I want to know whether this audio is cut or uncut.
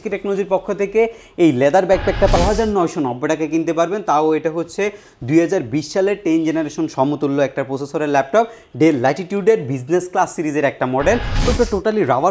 cut